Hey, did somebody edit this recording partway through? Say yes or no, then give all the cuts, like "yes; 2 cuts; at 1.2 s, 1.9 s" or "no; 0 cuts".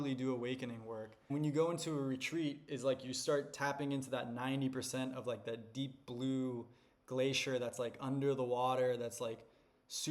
yes; 1 cut; at 1.3 s